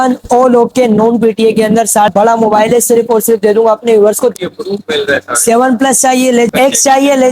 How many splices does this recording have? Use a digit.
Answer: 3